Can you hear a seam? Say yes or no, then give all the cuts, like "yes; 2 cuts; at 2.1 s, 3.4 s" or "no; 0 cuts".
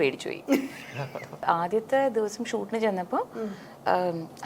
yes; 1 cut; at 1.4 s